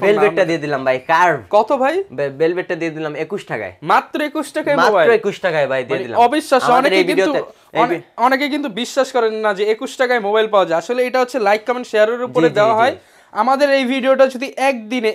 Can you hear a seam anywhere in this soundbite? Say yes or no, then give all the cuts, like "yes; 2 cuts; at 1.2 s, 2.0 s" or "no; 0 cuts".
no; 0 cuts